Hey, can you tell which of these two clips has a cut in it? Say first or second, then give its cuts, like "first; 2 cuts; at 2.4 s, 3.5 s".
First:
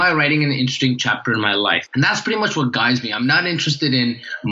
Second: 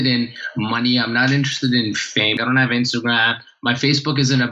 second; 1 cut; at 2.4 s